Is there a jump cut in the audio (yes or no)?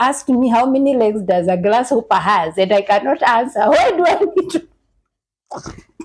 no